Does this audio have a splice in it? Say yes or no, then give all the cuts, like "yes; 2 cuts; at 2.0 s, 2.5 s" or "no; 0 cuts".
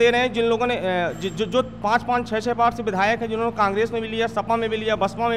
no; 0 cuts